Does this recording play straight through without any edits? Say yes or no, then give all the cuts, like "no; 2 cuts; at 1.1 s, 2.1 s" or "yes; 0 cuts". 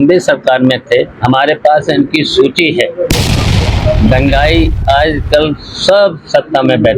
yes; 0 cuts